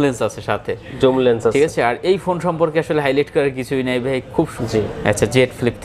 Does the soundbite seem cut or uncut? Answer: cut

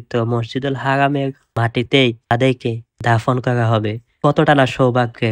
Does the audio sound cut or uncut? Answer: cut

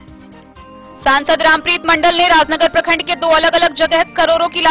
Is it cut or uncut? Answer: cut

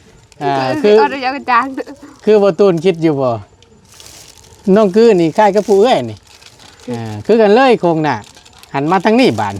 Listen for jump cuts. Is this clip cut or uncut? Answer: uncut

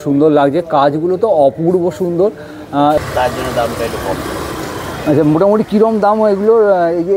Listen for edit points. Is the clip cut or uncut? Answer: cut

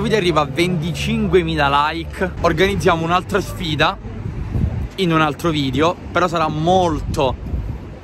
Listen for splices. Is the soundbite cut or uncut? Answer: uncut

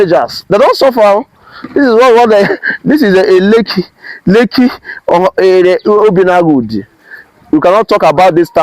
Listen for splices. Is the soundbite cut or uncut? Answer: cut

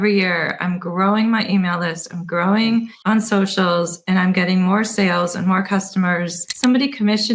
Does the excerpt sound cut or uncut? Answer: cut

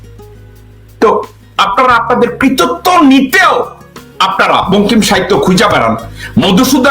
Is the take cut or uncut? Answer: cut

